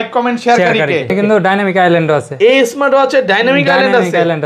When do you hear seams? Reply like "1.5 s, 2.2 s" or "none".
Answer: 1.1 s